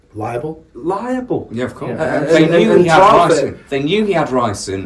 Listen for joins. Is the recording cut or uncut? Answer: uncut